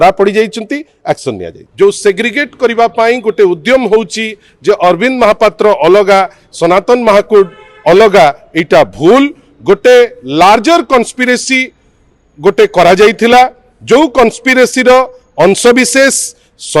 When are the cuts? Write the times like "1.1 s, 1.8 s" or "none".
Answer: 1.6 s